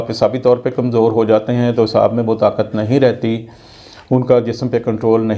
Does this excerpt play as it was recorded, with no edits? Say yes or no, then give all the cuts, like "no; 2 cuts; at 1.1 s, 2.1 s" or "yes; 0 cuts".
yes; 0 cuts